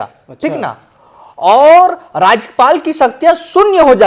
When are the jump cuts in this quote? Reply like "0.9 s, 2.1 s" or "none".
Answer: none